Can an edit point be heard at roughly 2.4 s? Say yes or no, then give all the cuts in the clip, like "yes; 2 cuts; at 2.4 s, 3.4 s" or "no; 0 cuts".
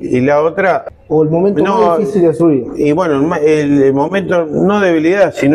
no; 1 cut; at 0.9 s